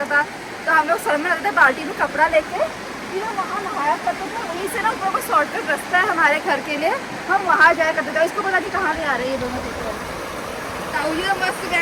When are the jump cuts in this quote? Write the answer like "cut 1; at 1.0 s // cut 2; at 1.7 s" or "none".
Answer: none

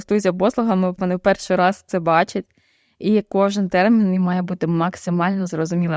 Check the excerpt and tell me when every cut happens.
cut 1; at 0.9 s

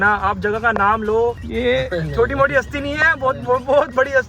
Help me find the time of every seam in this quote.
cut 1; at 1.4 s

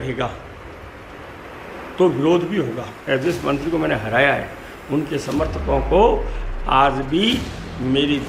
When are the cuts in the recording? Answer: cut 1; at 3.0 s

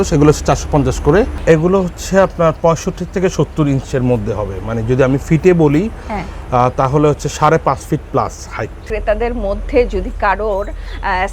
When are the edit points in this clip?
cut 1; at 1.3 s // cut 2; at 8.9 s

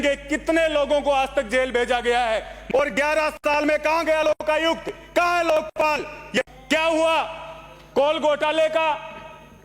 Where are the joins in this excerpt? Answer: cut 1; at 2.5 s // cut 2; at 6.5 s

